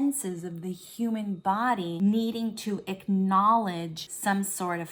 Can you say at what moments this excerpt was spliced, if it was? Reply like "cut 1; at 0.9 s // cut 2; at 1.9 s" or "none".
cut 1; at 1.9 s // cut 2; at 4.0 s